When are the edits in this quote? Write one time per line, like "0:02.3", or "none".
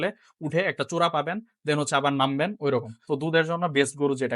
0:02.9